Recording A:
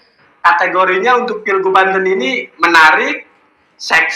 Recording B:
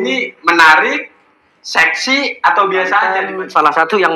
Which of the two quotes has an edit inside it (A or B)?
B